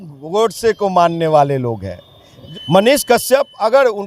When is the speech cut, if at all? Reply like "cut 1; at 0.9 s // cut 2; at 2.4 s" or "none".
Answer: cut 1; at 2.5 s